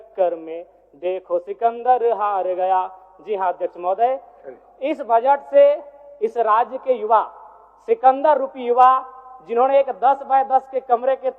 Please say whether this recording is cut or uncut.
uncut